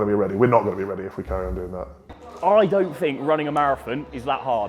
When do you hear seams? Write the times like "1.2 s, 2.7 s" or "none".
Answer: 2.0 s